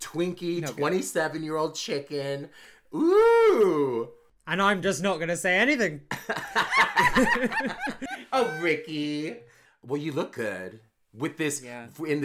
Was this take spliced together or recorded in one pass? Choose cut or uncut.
cut